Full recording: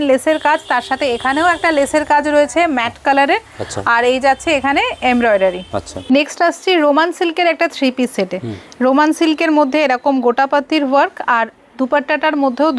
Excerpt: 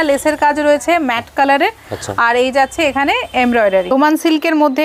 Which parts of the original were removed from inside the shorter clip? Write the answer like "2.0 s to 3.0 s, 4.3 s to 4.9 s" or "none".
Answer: 5.6 s to 8.9 s